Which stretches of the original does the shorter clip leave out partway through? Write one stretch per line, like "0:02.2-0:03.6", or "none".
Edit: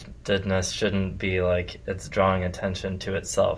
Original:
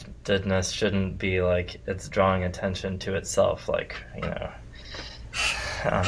none